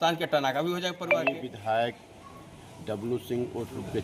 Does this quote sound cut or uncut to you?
uncut